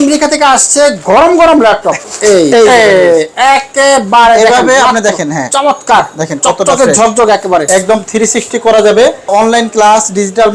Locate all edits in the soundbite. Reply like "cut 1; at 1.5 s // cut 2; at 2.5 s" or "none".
cut 1; at 2.0 s // cut 2; at 7.7 s // cut 3; at 9.3 s